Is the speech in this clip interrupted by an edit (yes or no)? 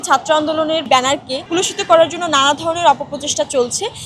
yes